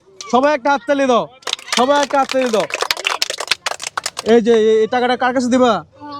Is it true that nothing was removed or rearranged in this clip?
yes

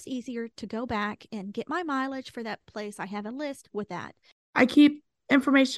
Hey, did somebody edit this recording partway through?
yes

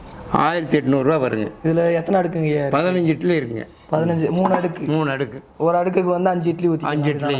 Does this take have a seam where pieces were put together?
no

